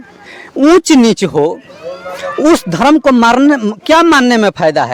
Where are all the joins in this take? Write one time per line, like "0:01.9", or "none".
none